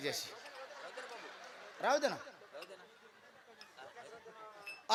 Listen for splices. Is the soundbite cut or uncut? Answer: uncut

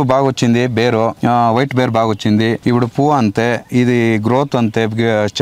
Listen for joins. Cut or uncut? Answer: cut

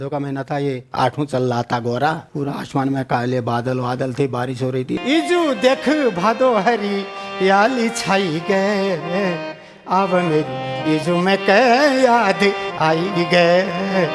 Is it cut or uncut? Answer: cut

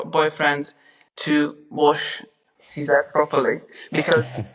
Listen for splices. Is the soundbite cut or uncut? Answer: uncut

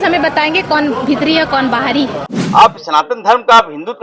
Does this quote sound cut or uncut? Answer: cut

